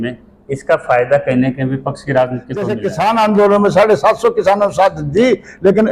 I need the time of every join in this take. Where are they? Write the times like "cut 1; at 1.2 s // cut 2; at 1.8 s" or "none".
cut 1; at 2.8 s